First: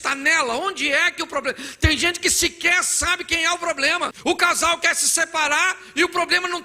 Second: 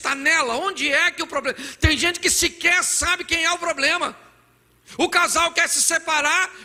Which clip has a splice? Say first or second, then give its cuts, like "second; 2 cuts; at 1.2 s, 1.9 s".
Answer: first; 1 cut; at 4.2 s